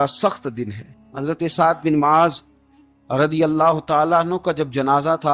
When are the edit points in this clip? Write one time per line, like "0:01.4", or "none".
0:01.1